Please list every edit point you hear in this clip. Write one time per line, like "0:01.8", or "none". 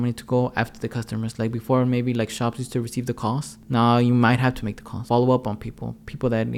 0:03.6
0:05.0